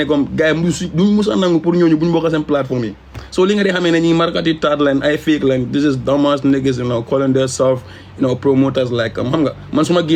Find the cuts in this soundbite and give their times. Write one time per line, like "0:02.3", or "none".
none

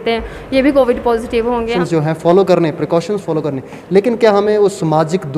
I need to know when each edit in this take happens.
0:01.7

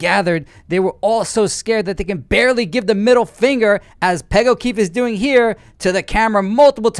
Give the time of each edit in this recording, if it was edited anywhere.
none

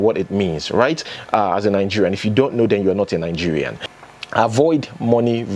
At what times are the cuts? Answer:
0:03.8

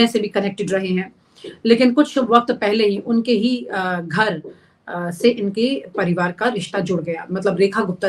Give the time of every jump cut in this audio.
none

